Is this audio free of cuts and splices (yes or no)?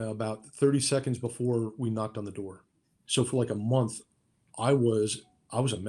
no